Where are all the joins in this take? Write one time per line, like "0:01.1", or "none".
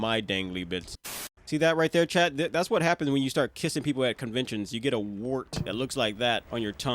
0:01.2
0:05.6